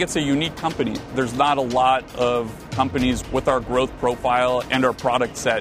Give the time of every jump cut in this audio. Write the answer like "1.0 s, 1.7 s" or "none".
1.1 s, 3.2 s, 4.7 s